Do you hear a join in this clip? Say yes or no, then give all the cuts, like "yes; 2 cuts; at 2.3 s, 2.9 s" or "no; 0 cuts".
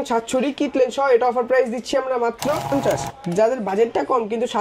yes; 1 cut; at 2.7 s